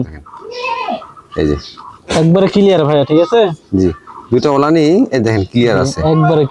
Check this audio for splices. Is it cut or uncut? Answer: uncut